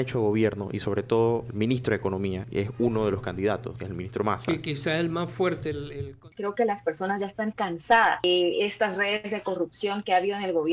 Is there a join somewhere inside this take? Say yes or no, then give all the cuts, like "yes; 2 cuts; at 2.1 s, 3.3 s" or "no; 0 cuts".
yes; 5 cuts; at 1.5 s, 2.4 s, 3.8 s, 6.2 s, 8.2 s